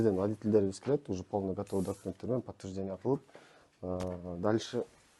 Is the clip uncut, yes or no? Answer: yes